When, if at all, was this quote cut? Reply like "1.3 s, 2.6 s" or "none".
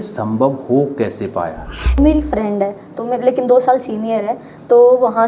2.0 s